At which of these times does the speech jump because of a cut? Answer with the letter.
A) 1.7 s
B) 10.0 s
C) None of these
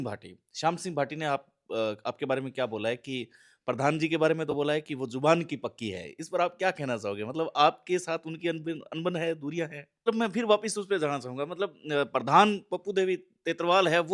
B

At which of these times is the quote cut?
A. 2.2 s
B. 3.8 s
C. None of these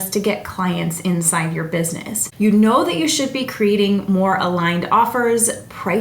A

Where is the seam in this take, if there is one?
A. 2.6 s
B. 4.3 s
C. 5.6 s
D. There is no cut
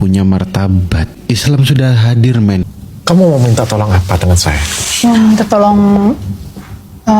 A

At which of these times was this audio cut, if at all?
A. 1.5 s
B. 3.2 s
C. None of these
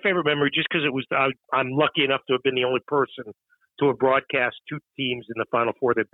C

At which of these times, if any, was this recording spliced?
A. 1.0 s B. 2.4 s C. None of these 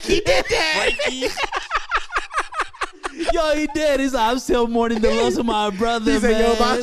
C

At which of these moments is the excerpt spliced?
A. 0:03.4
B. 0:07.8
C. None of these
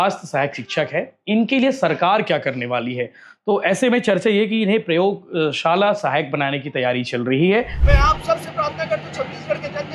B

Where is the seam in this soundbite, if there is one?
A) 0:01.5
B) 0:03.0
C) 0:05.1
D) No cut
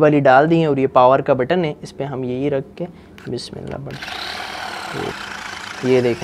C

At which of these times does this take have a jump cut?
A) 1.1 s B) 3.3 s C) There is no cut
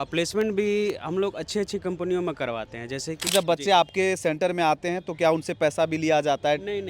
B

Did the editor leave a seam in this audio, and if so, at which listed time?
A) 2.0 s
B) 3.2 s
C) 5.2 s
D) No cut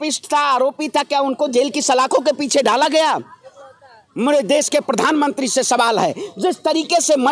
D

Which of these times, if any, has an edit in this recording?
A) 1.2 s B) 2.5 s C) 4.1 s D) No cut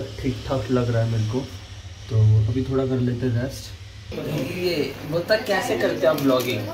C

